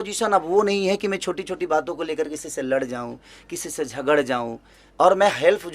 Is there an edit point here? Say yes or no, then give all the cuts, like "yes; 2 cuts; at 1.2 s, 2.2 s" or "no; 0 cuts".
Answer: no; 0 cuts